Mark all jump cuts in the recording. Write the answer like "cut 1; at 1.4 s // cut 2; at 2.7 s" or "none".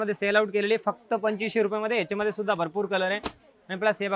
none